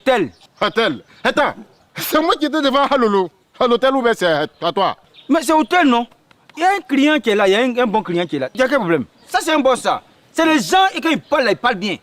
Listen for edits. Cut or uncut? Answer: cut